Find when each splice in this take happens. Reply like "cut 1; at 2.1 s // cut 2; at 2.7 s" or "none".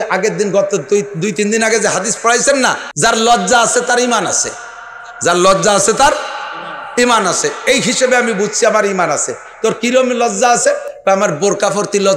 cut 1; at 2.8 s

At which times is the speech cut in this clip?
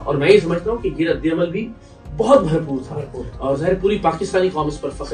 none

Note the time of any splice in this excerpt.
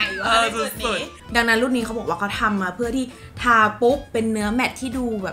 cut 1; at 1.1 s

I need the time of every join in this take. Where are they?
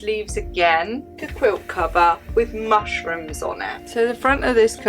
cut 1; at 1.0 s // cut 2; at 3.8 s

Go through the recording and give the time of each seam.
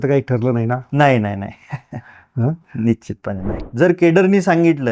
cut 1; at 3.5 s

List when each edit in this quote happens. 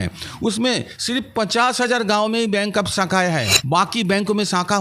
cut 1; at 3.5 s

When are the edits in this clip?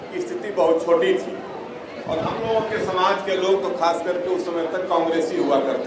none

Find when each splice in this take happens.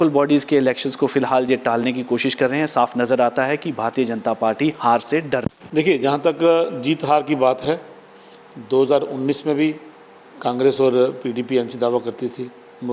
cut 1; at 5.6 s

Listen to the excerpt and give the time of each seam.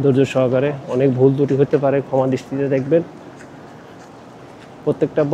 none

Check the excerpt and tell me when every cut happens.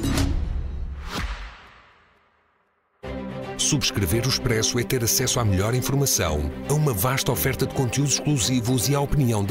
cut 1; at 0.9 s

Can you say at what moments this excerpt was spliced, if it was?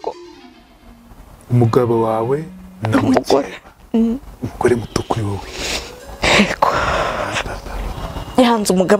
cut 1; at 7.9 s

